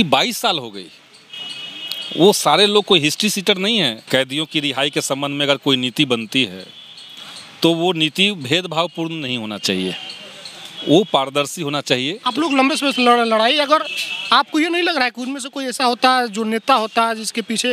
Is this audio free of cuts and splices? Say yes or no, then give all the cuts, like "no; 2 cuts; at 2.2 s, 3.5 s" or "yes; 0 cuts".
no; 2 cuts; at 4.0 s, 12.2 s